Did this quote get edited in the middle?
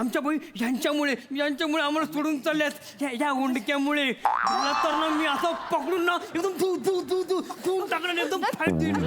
no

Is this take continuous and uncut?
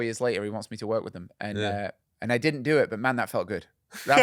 no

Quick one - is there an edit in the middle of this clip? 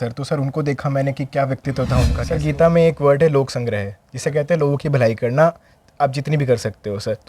yes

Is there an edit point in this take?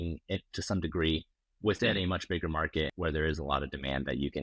yes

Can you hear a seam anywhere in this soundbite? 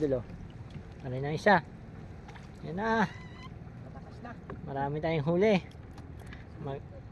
no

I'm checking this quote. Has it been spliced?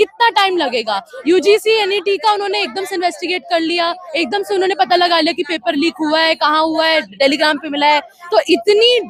no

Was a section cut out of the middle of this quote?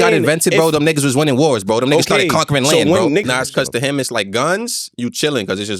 yes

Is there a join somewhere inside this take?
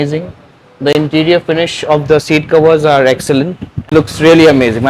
yes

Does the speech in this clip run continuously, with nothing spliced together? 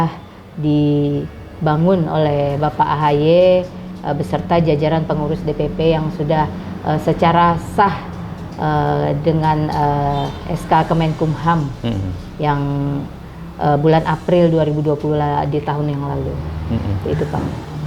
yes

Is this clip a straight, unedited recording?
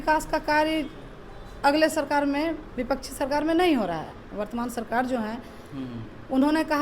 yes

